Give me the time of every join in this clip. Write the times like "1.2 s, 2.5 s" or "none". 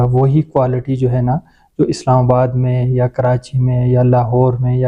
none